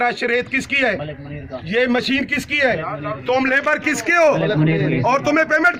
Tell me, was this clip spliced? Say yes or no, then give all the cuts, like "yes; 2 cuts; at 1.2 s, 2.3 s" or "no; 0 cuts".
no; 0 cuts